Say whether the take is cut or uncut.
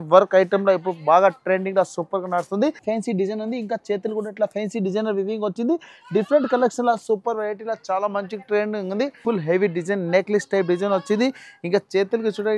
cut